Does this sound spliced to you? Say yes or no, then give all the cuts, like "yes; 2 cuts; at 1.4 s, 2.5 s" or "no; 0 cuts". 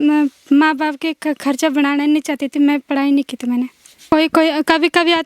yes; 1 cut; at 3.9 s